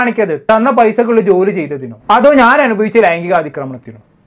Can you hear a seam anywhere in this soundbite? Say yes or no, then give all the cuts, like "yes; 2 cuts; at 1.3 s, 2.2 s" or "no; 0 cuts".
no; 0 cuts